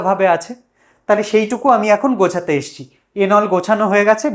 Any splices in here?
no; 0 cuts

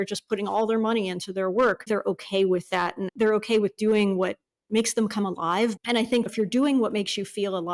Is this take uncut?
no; 3 cuts; at 1.9 s, 3.1 s, 6.2 s

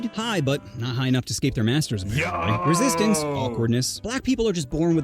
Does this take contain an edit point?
no; 0 cuts

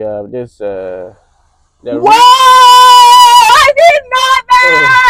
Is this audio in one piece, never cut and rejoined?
yes; 0 cuts

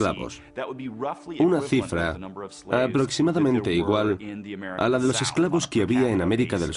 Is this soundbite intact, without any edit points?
no; 1 cut; at 1.1 s

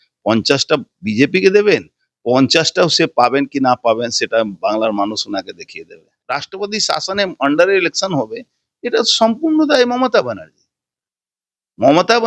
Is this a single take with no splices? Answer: no; 1 cut; at 6.1 s

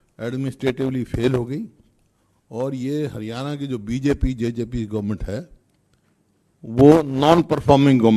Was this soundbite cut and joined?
no; 0 cuts

